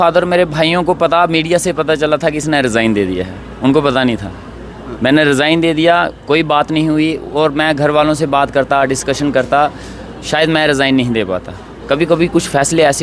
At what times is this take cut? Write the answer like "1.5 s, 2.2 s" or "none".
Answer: none